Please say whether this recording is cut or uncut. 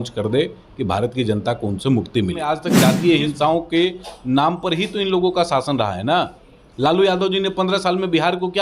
cut